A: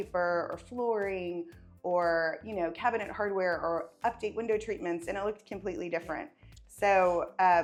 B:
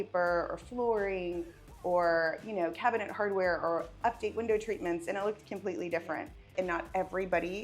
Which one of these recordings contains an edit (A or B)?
B